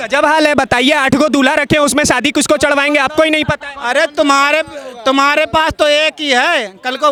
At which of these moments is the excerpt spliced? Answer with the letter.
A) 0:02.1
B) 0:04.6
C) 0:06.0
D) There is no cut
D